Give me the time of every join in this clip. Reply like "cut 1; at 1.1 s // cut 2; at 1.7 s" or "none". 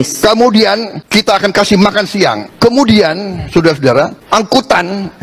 cut 1; at 0.9 s // cut 2; at 2.5 s // cut 3; at 4.2 s